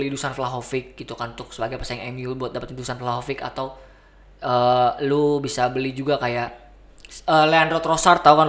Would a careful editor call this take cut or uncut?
uncut